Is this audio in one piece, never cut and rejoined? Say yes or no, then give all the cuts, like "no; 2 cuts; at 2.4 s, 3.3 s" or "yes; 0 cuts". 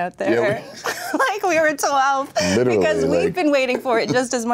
yes; 0 cuts